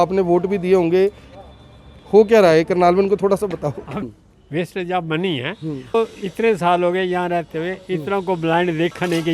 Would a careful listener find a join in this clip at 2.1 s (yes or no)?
no